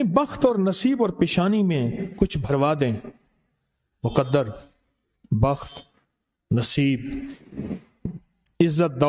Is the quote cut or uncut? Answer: uncut